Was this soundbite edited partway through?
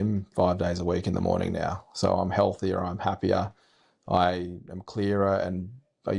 no; 0 cuts

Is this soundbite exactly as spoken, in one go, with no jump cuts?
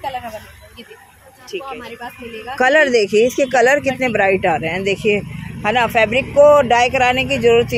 no; 1 cut; at 1.7 s

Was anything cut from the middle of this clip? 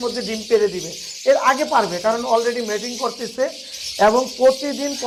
no; 0 cuts

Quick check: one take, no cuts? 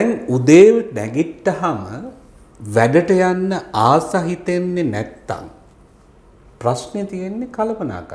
yes; 0 cuts

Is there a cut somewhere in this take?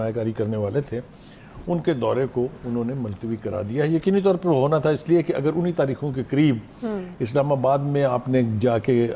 no; 0 cuts

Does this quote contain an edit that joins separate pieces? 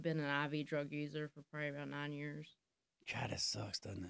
no; 0 cuts

